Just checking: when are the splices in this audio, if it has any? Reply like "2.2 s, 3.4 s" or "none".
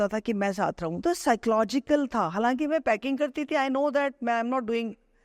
1.0 s